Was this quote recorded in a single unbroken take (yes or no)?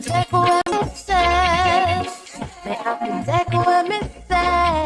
yes